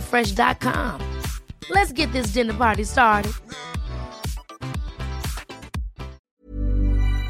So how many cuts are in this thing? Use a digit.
1